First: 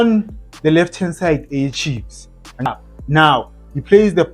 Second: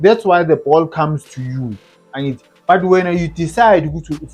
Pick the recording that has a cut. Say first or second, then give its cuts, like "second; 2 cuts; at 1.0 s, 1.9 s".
first; 1 cut; at 2.7 s